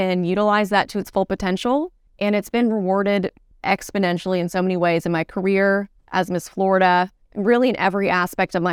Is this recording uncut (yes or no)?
no